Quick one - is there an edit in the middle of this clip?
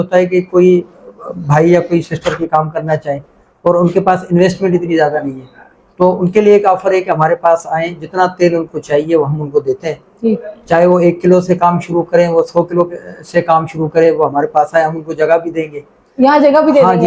no; 0 cuts

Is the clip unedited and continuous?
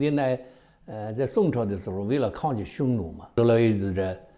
no; 1 cut; at 3.3 s

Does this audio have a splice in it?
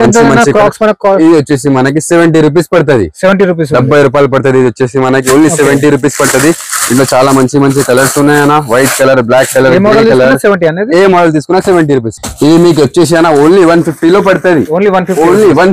yes; 1 cut; at 12.2 s

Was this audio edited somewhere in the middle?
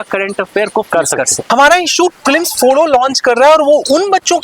yes; 1 cut; at 1.4 s

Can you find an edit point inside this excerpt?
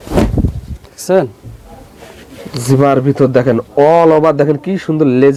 no; 0 cuts

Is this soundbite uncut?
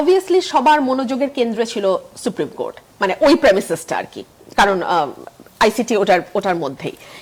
yes; 0 cuts

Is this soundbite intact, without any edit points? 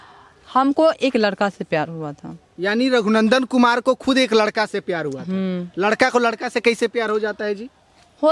yes; 0 cuts

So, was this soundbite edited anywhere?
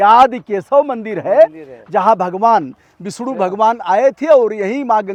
no; 0 cuts

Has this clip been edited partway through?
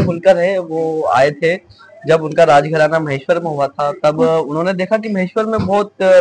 no; 0 cuts

